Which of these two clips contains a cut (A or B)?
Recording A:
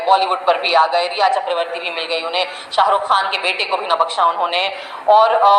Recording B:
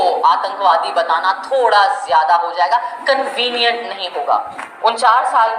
B